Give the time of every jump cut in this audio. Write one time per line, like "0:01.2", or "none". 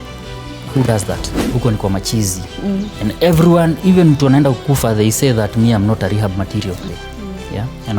0:01.3
0:06.8